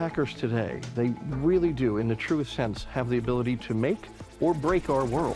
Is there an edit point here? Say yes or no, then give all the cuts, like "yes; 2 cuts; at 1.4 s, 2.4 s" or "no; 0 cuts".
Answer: no; 0 cuts